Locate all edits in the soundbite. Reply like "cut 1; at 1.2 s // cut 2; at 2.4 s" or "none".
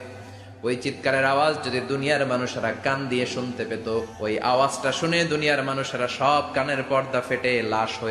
cut 1; at 4.1 s